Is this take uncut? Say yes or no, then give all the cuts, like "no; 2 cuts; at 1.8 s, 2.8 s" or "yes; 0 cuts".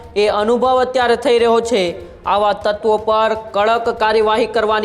yes; 0 cuts